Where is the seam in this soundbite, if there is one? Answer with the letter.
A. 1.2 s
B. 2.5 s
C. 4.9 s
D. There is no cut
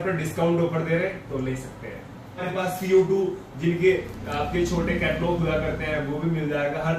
B